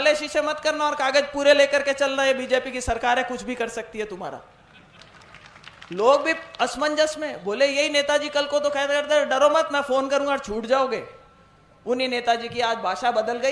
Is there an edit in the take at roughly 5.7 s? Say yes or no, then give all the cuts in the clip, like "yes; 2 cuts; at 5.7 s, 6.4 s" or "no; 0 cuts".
no; 0 cuts